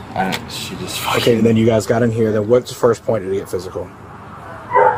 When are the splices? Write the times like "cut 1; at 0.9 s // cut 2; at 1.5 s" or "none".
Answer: none